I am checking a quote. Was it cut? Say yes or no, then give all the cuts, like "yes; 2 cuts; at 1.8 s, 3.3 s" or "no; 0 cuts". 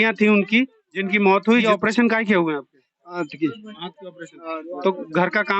yes; 1 cut; at 1.6 s